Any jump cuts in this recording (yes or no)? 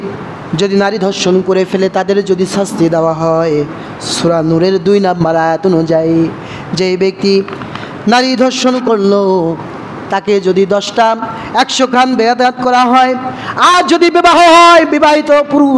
no